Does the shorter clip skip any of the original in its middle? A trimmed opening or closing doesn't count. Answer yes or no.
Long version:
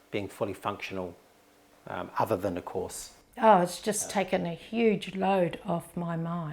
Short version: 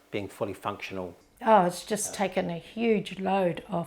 yes